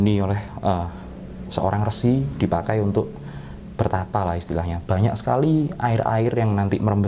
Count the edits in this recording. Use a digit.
0